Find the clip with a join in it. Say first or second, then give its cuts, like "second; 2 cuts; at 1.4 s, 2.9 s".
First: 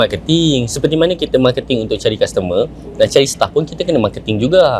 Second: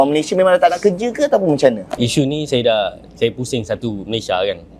second; 1 cut; at 1.9 s